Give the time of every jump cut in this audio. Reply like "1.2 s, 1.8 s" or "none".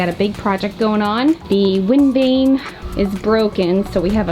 1.4 s, 2.8 s